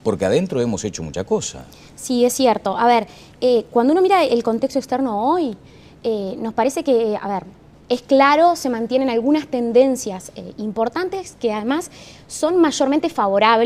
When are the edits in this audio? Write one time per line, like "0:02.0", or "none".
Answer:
0:11.8